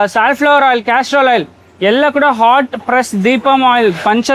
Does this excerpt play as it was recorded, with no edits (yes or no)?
yes